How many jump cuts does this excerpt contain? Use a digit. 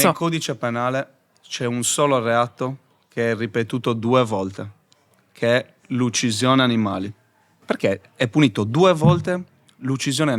1